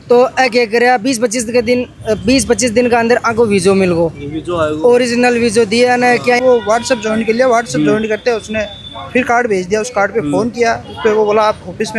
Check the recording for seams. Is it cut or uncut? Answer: cut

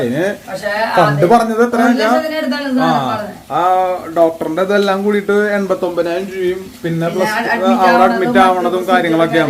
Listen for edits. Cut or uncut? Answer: uncut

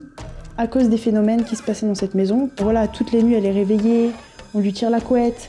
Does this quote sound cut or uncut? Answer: cut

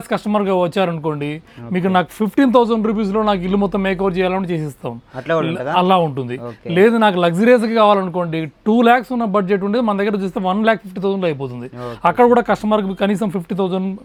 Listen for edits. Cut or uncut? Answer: uncut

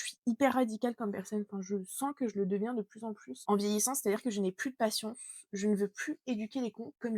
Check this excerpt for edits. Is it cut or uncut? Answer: uncut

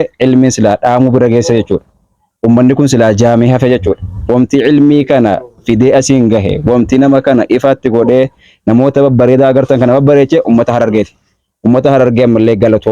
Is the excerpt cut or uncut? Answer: uncut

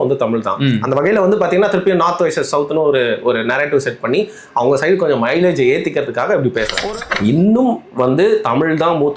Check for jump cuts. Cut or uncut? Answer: cut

